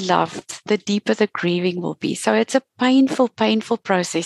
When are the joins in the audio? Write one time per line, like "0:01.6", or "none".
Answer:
none